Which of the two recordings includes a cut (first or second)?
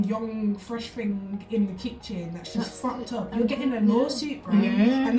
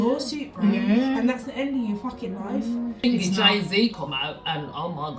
second